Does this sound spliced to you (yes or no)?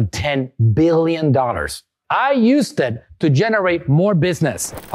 yes